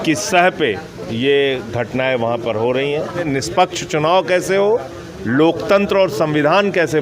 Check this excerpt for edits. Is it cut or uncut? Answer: cut